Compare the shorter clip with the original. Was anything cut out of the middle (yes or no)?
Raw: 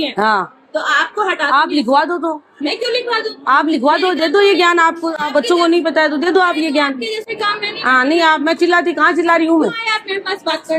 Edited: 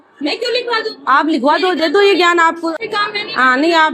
yes